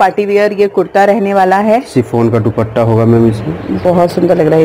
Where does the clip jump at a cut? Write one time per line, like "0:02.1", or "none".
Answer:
0:03.7